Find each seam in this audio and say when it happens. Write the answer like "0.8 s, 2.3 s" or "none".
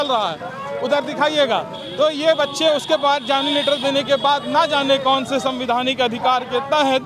none